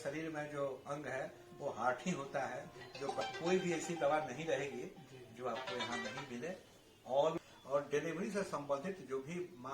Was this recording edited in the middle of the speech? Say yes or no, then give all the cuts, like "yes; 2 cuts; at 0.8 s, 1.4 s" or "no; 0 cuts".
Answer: yes; 2 cuts; at 3.2 s, 7.4 s